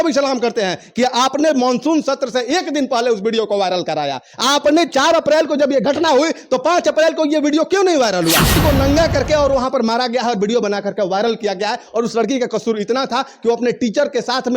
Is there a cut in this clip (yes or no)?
yes